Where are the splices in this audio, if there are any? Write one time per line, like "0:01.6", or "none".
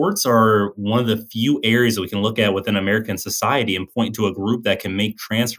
none